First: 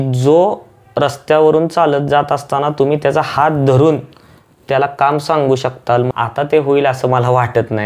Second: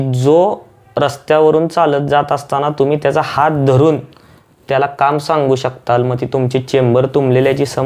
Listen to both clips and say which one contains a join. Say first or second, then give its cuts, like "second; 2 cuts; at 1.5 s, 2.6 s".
first; 1 cut; at 6.1 s